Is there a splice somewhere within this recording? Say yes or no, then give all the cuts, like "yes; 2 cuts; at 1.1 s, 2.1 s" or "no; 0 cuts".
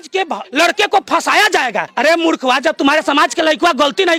no; 0 cuts